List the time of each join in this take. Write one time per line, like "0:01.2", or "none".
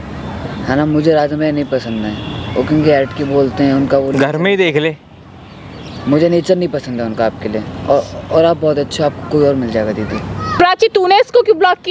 0:10.5